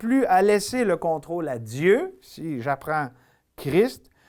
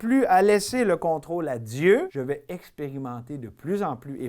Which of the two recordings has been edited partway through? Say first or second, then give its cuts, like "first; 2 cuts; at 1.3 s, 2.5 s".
second; 1 cut; at 2.1 s